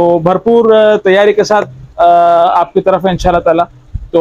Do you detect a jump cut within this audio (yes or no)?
no